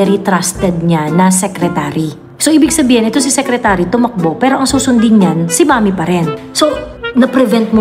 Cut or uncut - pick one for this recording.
cut